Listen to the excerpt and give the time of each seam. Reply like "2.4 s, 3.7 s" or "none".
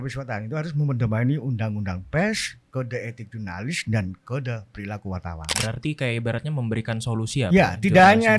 5.5 s